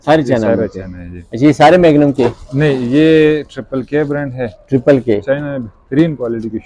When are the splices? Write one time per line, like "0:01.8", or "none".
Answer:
none

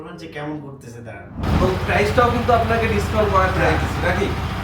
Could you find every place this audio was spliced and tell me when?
0:01.4

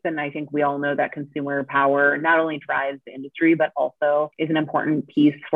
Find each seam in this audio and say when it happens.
0:04.4

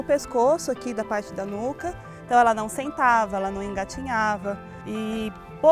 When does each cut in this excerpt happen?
0:04.7

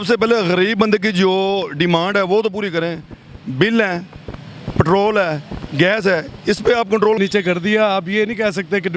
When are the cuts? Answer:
0:07.2

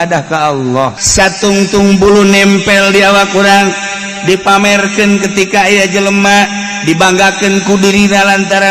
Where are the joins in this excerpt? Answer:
0:01.0

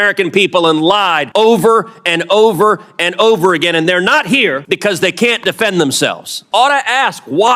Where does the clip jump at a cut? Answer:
0:01.2
0:04.6
0:06.4

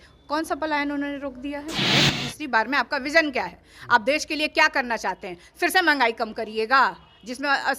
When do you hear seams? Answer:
0:01.8

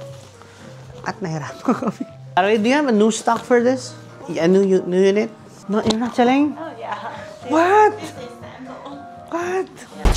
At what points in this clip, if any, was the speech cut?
0:02.4
0:04.2

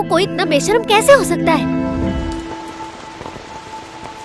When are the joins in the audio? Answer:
0:02.2

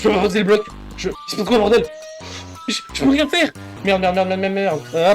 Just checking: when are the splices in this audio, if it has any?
0:01.2
0:03.7

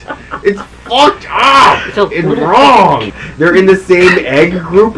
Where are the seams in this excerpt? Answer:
0:03.1

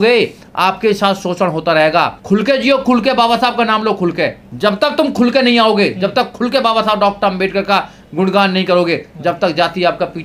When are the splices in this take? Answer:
0:02.2
0:04.4

